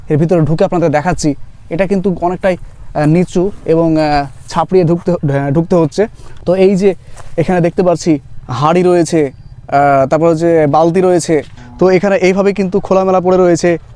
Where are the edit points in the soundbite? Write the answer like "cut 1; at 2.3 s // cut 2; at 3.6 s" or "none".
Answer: cut 1; at 6.3 s // cut 2; at 11.5 s